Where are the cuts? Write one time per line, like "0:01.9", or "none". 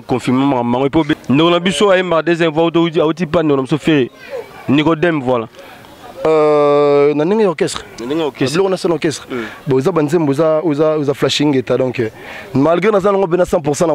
0:01.2

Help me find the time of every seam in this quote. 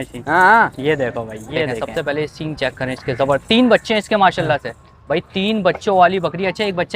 0:01.8

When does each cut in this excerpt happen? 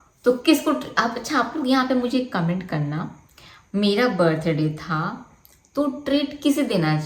none

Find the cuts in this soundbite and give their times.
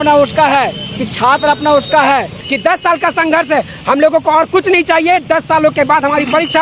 0:02.4

